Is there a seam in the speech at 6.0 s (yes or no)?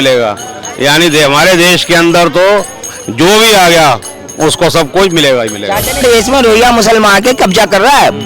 yes